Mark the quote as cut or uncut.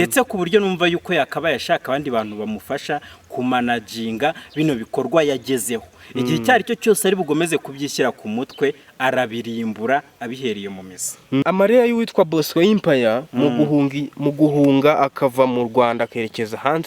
cut